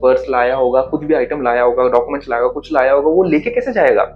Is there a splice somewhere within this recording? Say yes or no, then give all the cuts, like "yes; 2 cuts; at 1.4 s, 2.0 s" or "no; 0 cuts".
no; 0 cuts